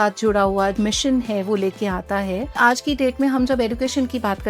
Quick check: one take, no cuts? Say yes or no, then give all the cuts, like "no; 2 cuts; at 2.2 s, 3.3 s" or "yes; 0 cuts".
no; 2 cuts; at 0.7 s, 2.5 s